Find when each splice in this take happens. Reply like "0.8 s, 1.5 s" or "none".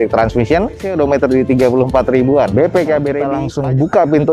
0.9 s, 3.4 s